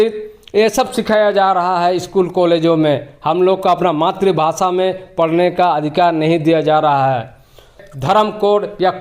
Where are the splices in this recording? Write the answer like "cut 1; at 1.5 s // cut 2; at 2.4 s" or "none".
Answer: cut 1; at 7.9 s